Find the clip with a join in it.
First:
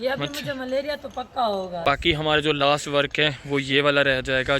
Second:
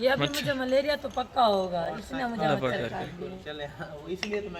first; 1 cut; at 1.9 s

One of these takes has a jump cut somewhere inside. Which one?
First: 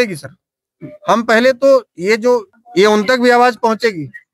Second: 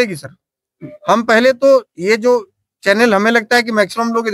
first; 1 cut; at 2.6 s

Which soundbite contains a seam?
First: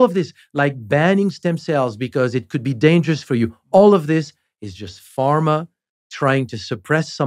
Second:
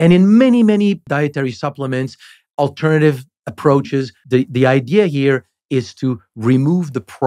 second; 2 cuts; at 1.0 s, 4.2 s

